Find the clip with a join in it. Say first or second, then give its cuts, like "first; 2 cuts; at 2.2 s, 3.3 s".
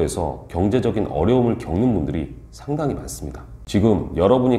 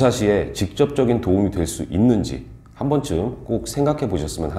first; 1 cut; at 3.5 s